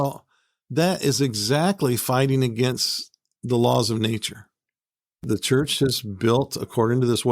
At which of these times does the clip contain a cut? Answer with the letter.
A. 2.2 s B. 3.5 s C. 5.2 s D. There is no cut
C